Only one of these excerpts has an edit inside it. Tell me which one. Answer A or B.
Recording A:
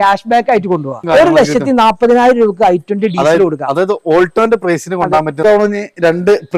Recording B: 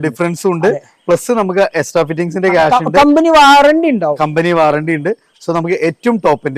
A